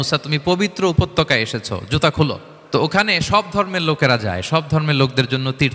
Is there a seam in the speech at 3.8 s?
no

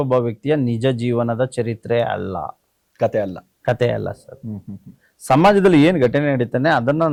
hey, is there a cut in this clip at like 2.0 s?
no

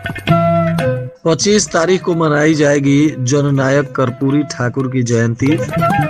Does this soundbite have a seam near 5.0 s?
no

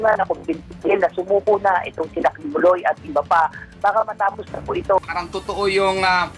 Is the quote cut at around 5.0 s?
yes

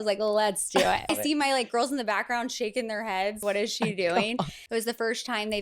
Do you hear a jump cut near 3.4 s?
yes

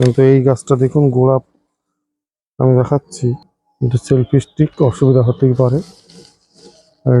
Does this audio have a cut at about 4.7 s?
no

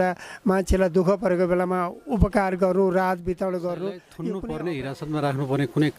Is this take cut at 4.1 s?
yes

